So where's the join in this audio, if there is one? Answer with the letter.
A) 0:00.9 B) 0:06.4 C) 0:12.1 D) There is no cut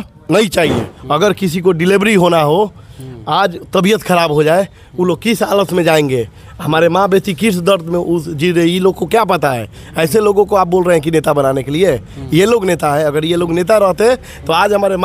A